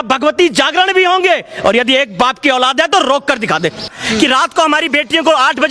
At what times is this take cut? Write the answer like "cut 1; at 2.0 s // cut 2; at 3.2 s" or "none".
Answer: cut 1; at 3.9 s